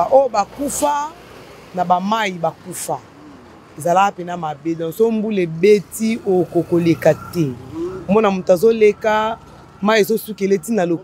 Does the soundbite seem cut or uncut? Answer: uncut